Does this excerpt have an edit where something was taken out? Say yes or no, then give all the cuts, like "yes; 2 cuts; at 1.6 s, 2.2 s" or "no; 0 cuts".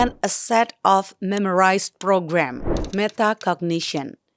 yes; 1 cut; at 2.8 s